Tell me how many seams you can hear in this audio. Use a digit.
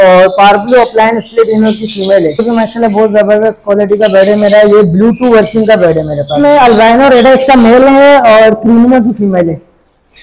2